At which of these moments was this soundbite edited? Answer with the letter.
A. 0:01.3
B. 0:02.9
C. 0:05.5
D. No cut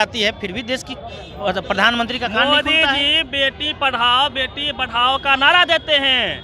D